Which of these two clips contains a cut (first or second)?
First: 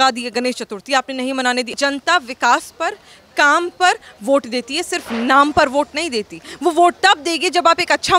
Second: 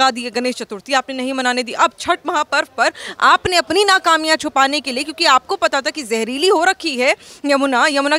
first